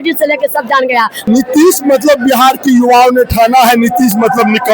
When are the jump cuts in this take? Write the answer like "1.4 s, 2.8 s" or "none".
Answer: 1.2 s